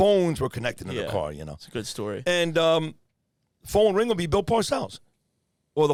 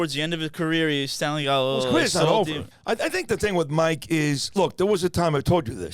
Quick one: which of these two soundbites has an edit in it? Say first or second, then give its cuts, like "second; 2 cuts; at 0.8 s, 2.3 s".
second; 1 cut; at 2.7 s